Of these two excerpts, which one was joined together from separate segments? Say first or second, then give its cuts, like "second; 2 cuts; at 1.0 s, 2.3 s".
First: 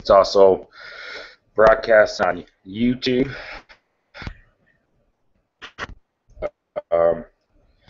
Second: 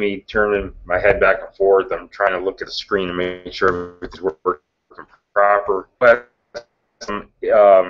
first; 1 cut; at 6.0 s